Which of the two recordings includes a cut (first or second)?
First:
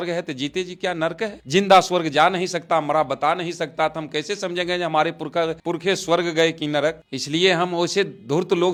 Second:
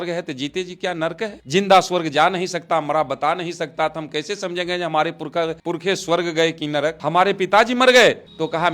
second